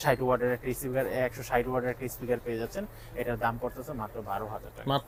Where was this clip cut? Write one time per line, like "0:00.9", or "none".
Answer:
none